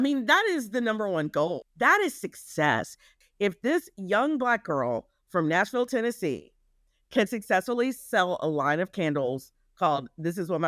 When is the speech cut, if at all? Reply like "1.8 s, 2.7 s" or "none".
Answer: 1.6 s, 3.2 s